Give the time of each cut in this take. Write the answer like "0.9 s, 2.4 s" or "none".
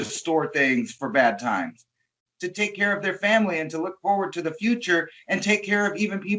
2.2 s